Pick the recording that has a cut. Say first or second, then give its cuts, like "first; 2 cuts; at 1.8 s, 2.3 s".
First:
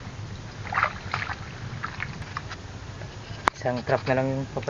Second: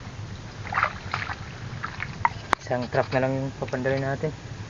second; 1 cut; at 2.3 s